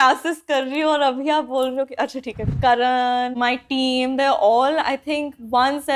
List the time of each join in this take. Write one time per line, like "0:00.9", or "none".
0:02.5
0:03.3